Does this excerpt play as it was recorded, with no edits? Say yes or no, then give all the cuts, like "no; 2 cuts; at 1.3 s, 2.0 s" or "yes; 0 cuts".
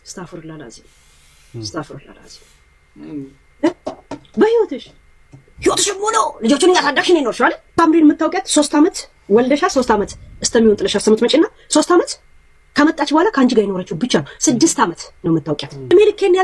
yes; 0 cuts